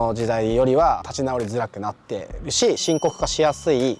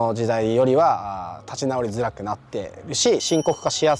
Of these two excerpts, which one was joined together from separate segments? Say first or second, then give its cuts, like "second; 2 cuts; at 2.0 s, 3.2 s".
first; 1 cut; at 1.1 s